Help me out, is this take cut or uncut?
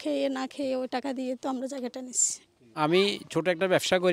uncut